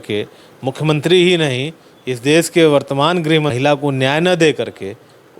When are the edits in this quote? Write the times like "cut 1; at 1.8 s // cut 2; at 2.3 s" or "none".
cut 1; at 3.5 s